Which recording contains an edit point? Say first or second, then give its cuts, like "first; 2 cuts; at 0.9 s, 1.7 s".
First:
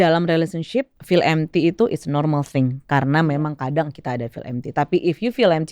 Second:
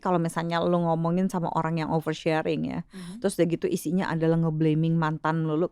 first; 1 cut; at 1.0 s